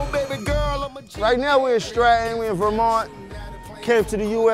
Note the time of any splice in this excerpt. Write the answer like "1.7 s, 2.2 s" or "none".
1.2 s

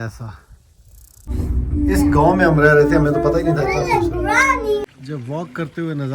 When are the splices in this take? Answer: 1.3 s, 4.9 s

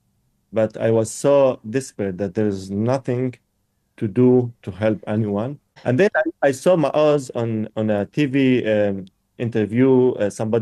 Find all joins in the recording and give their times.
5.7 s

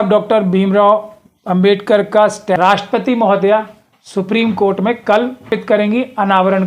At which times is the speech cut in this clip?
2.6 s, 5.5 s

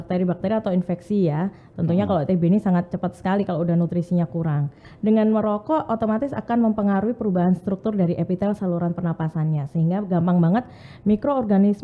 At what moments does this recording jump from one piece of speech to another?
4.8 s

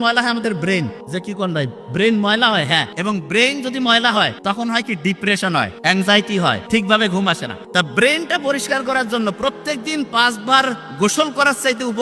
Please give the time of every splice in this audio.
1.0 s, 2.9 s, 4.4 s, 5.7 s, 6.6 s, 7.5 s

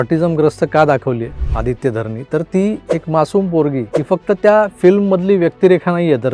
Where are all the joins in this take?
1.4 s, 2.8 s, 3.9 s

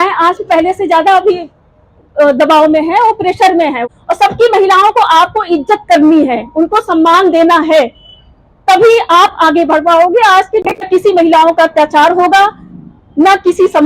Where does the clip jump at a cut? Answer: 3.8 s, 10.9 s

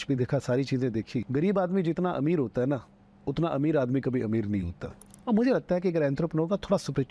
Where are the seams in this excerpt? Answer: 1.3 s, 5.1 s

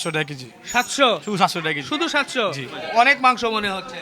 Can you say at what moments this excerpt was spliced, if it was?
2.7 s

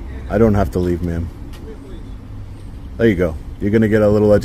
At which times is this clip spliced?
none

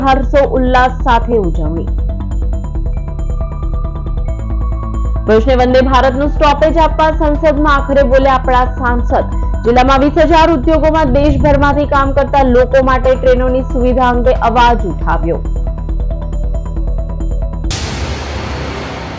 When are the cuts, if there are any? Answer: 17.8 s

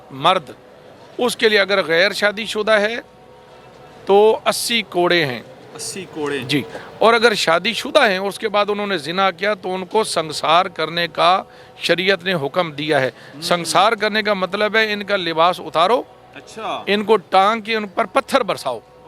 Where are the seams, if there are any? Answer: none

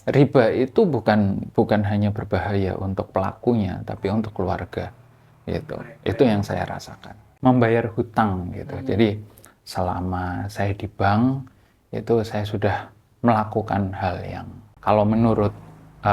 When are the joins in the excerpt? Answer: 7.3 s

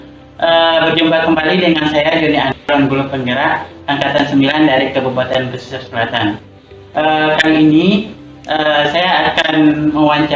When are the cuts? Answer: 2.6 s

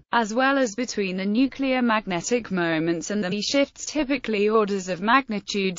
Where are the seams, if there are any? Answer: none

